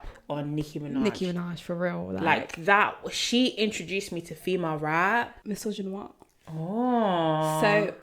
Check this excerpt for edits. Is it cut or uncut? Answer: cut